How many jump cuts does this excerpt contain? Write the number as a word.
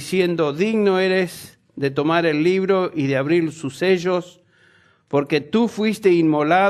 one